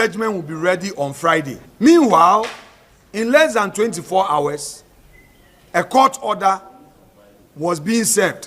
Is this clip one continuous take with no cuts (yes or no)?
no